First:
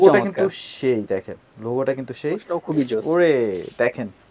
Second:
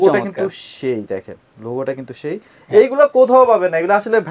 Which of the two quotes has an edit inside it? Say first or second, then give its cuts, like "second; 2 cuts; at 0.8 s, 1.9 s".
first; 1 cut; at 2.5 s